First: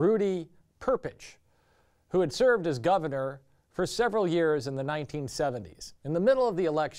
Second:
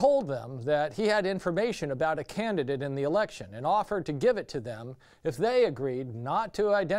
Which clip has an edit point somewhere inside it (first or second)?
second